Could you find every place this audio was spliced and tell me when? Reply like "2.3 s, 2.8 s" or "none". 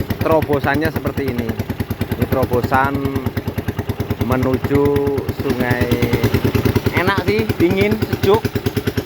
6.1 s